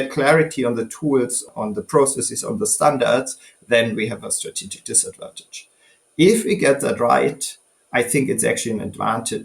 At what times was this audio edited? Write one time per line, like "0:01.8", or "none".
0:01.4